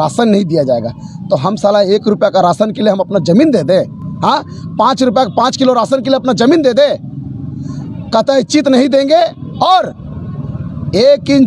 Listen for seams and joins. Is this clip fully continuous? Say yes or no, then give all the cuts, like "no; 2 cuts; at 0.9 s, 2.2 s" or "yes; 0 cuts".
yes; 0 cuts